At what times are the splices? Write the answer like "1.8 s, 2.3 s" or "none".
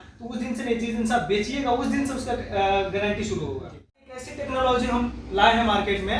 4.3 s